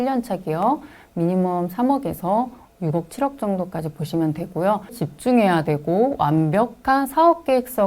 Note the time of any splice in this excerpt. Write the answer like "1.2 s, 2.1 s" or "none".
5.0 s

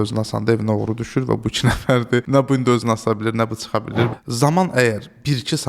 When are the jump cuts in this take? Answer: 2.3 s, 4.1 s

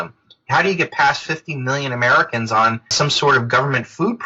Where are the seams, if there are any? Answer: 2.9 s

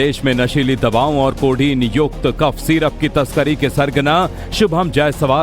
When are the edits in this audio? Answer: 1.4 s

